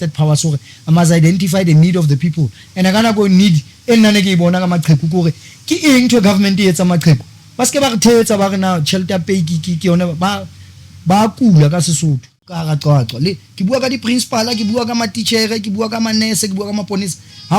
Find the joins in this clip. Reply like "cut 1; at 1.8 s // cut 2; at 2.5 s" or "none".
cut 1; at 12.6 s